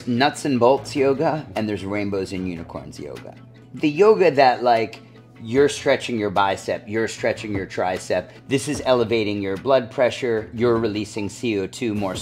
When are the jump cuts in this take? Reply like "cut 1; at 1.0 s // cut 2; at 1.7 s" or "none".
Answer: cut 1; at 3.6 s // cut 2; at 8.4 s